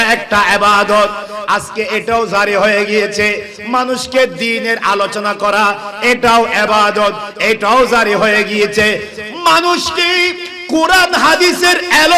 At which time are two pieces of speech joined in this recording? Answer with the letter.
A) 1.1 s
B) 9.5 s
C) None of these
C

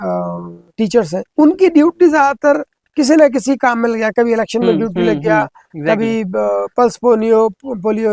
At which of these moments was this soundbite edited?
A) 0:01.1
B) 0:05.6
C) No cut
A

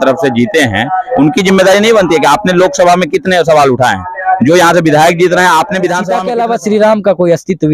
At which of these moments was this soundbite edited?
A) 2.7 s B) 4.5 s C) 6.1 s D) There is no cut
C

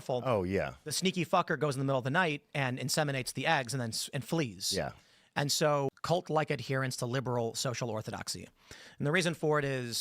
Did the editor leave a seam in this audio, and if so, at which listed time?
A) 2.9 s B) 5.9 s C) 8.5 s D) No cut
B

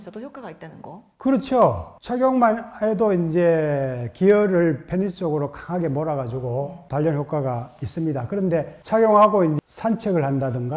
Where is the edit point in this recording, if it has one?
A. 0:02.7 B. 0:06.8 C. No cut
C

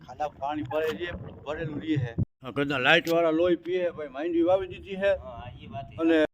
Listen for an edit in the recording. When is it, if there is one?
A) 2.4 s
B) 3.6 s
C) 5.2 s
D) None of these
A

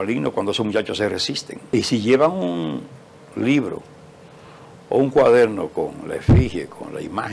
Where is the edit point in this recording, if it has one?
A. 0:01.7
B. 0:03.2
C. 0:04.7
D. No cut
A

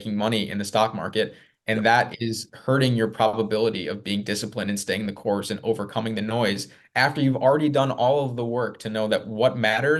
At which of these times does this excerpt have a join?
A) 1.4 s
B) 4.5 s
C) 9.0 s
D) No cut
D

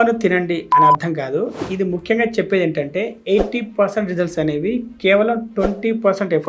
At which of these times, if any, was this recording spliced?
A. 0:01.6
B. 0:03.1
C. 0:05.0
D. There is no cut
A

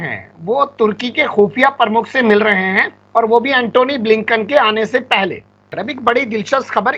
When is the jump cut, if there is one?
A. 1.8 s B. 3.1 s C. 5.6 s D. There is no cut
C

